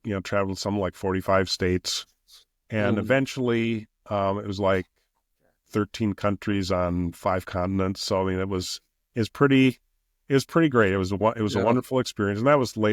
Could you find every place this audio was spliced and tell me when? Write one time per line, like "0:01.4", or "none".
none